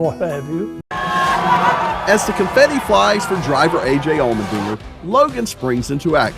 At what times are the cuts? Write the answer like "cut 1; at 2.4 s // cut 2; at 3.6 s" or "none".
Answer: cut 1; at 1.0 s